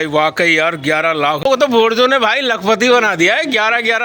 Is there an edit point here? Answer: yes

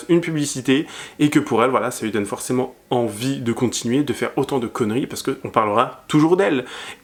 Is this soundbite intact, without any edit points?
yes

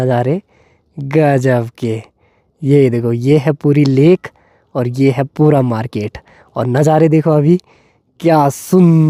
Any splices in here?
no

